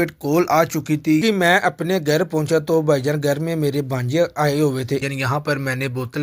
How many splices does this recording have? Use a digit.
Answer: 2